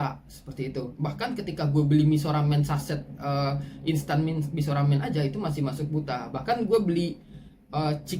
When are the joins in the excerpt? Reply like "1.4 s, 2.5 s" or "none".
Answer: none